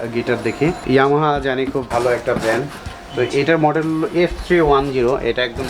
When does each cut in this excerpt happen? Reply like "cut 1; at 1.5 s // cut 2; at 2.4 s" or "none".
cut 1; at 0.8 s // cut 2; at 1.9 s